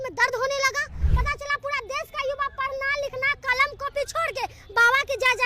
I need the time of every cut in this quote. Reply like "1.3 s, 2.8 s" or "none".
1.0 s